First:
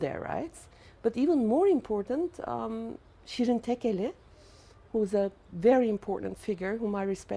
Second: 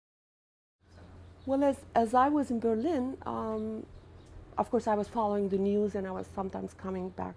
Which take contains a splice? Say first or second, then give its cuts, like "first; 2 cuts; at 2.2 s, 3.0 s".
second; 1 cut; at 5.2 s